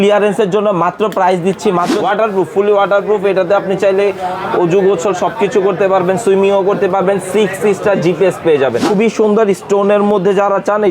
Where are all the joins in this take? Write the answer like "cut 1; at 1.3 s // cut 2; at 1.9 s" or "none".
cut 1; at 1.9 s // cut 2; at 8.8 s